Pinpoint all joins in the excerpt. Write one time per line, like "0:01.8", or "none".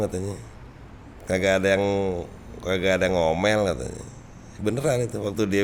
none